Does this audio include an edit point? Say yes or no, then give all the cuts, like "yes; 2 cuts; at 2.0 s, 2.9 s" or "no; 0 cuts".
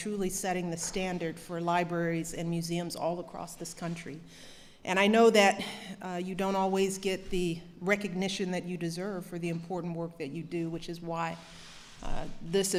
no; 0 cuts